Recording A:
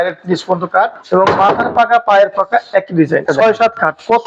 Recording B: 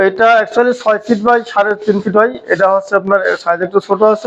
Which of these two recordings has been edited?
A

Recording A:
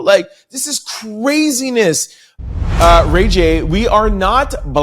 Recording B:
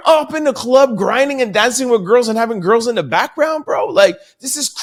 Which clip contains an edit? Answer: A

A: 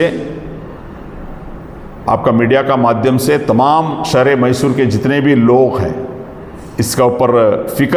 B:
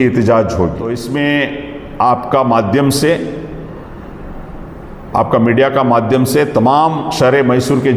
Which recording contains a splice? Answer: B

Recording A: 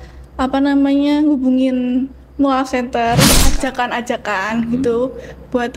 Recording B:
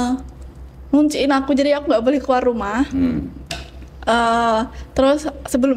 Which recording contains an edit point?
A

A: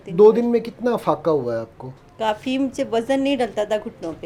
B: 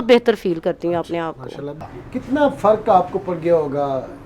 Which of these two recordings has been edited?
B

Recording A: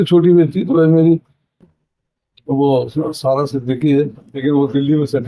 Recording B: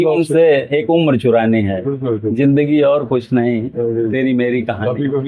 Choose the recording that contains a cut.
A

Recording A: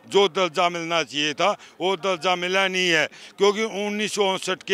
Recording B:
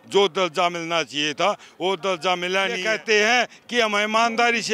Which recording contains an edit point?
B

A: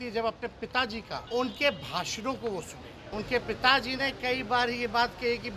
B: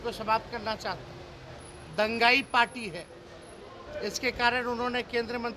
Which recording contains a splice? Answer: A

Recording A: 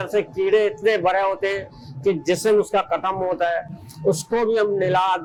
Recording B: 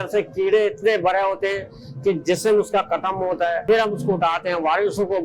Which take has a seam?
B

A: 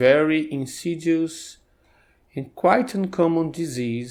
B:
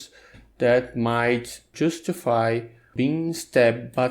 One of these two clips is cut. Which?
B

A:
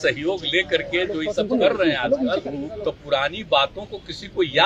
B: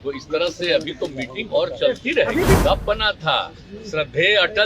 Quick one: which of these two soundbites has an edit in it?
B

